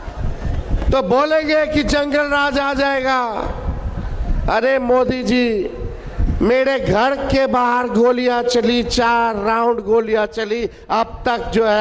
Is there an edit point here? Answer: no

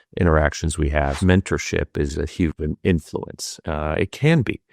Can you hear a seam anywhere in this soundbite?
yes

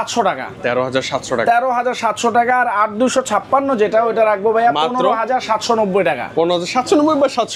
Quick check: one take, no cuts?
yes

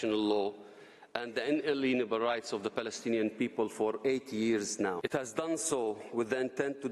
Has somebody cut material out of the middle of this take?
yes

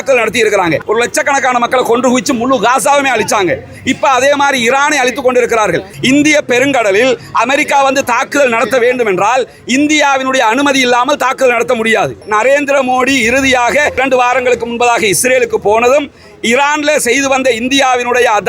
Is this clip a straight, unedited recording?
no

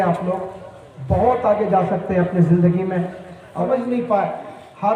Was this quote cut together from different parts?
yes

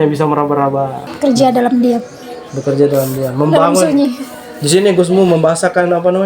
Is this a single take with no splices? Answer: no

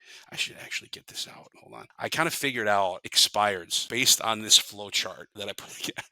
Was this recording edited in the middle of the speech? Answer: yes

